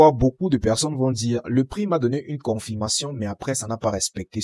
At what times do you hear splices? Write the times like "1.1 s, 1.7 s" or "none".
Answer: none